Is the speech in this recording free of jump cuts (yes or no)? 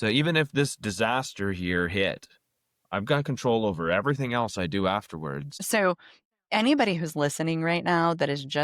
no